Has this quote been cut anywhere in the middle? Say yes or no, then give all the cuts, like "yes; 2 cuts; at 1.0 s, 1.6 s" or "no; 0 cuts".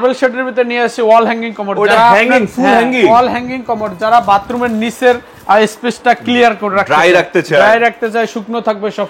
no; 0 cuts